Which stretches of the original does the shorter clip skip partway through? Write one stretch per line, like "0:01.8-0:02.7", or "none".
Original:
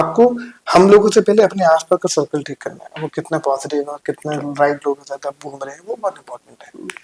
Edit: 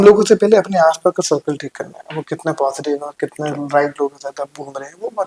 none

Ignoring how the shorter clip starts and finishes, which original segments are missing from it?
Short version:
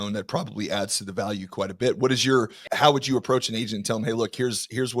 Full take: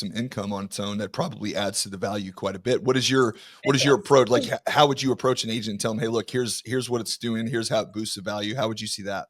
0:03.5-0:04.6

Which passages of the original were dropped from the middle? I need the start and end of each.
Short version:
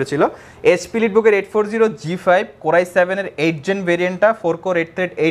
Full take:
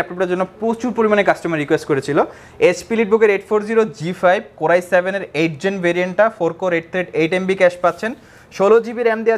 none

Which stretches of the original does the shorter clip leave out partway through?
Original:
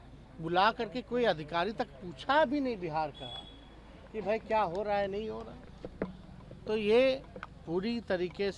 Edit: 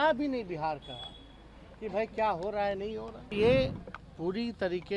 0:05.7-0:06.8

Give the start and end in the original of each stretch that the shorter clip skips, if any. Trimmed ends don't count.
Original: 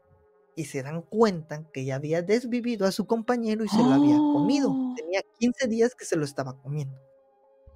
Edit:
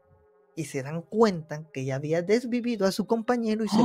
none

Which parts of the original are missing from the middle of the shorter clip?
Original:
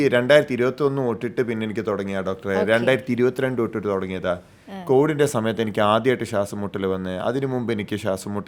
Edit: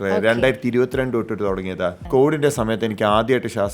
0:04.4-0:04.8

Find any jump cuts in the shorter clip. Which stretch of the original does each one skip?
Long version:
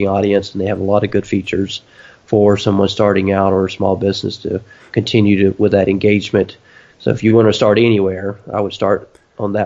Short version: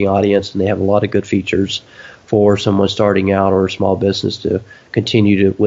none

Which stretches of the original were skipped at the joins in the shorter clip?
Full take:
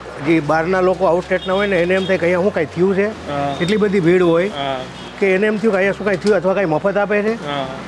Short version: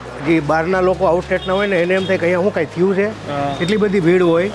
none

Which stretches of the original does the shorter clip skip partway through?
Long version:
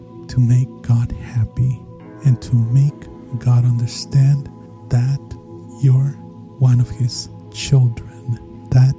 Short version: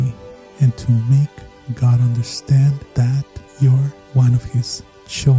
0:04.7-0:05.3
0:06.2-0:06.5

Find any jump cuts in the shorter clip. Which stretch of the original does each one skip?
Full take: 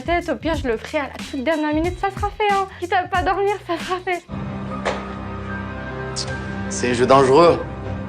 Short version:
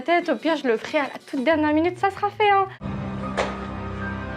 0:02.8-0:04.3

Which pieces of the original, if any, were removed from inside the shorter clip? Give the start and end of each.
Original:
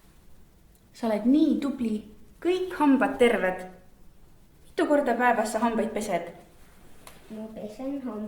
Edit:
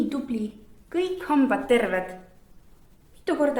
none

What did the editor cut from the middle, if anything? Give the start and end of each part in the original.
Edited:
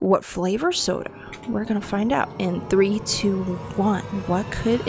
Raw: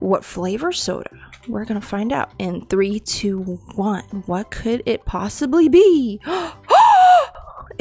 none

